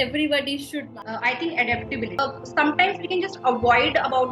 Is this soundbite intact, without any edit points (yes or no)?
no